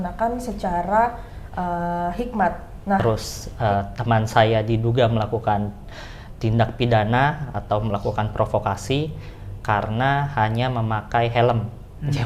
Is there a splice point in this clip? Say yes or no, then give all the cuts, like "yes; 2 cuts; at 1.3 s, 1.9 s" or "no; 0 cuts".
yes; 1 cut; at 3.0 s